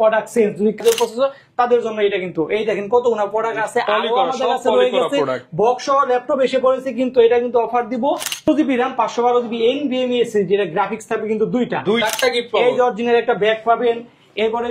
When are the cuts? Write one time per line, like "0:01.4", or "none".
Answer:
0:00.8
0:08.5
0:12.0